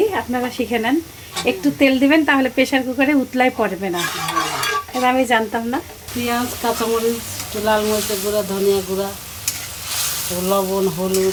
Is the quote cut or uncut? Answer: uncut